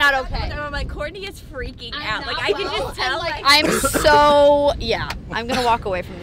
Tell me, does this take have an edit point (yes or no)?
no